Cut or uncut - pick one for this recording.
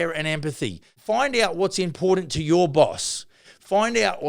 cut